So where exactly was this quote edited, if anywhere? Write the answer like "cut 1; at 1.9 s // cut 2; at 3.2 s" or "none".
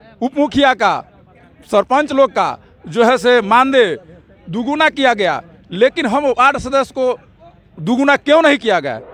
none